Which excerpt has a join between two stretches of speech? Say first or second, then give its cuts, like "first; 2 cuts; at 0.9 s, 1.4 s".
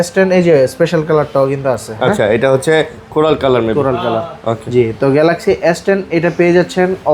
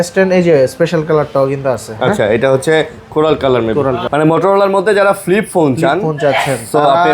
second; 1 cut; at 4.0 s